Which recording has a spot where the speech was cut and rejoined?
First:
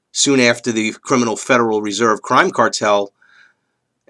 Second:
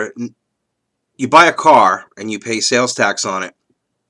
second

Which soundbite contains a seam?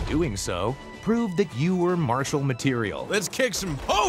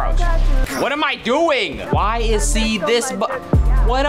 first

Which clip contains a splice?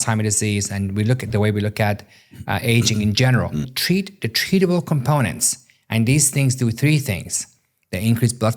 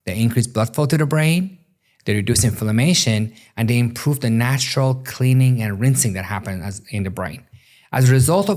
first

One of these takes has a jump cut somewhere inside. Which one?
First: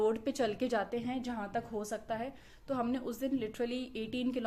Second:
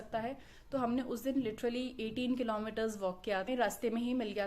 second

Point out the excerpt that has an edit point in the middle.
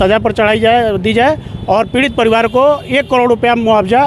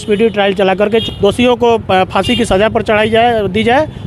second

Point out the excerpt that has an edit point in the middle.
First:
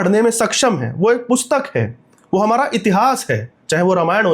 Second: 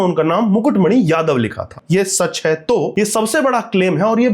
second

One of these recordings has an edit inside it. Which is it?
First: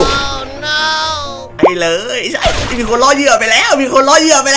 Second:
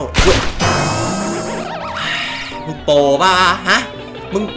first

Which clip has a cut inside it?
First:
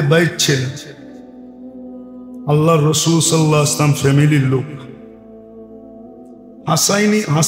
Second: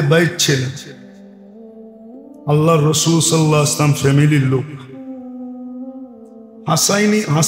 second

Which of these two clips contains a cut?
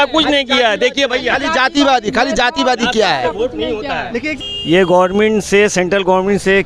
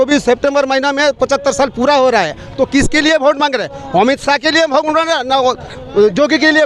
first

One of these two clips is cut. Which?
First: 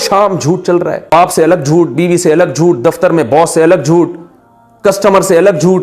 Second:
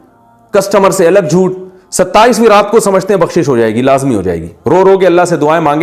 first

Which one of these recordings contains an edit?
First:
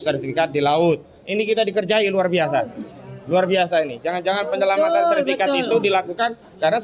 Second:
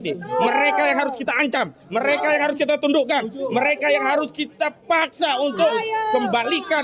first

